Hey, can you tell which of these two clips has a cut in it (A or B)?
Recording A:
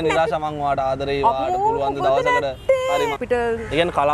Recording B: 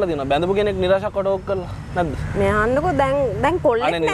A